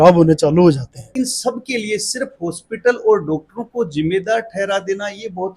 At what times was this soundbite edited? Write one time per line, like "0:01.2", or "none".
0:01.0